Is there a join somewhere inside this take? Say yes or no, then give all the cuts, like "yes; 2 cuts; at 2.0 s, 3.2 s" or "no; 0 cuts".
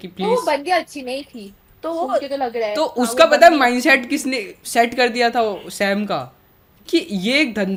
no; 0 cuts